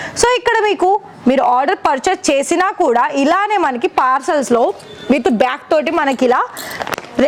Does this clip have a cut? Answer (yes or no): no